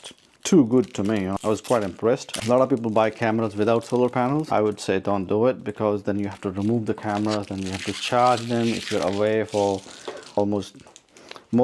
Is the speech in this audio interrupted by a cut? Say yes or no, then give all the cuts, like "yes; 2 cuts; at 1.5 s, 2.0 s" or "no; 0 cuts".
no; 0 cuts